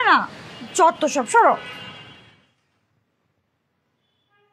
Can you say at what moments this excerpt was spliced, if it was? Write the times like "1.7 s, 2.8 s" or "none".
none